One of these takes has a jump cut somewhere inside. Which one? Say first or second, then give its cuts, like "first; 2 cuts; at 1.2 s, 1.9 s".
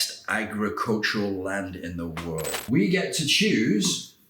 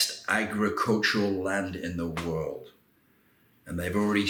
first; 1 cut; at 2.6 s